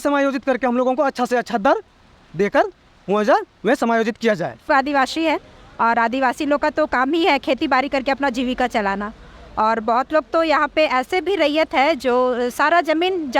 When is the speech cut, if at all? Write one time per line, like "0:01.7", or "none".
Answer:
0:04.7